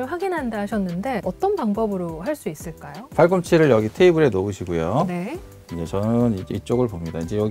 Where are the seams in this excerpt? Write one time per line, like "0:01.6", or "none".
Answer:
0:01.2
0:02.9